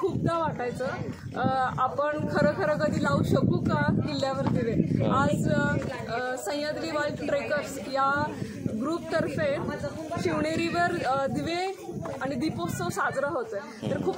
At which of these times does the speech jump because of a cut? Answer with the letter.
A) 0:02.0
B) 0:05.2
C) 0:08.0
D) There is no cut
D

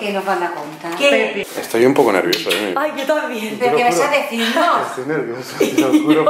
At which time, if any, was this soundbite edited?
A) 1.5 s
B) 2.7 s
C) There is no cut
A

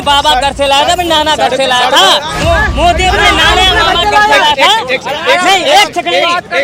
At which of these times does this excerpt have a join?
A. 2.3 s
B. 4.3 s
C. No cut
A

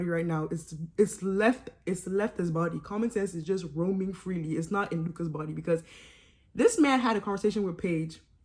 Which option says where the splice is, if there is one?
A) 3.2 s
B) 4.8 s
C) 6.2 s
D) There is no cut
D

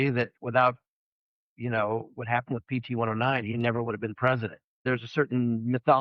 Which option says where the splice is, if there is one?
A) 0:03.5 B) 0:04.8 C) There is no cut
B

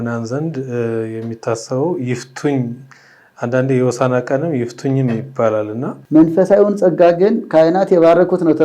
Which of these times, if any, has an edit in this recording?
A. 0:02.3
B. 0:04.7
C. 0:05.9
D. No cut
C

